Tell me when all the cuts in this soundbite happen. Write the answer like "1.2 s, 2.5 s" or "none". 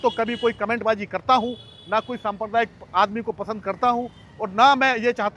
none